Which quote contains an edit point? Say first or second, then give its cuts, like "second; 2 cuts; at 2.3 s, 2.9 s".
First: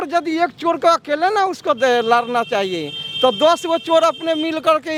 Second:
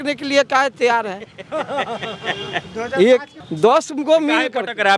second; 1 cut; at 3.4 s